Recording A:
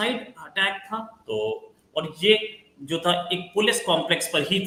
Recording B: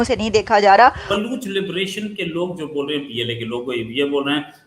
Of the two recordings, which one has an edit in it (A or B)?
B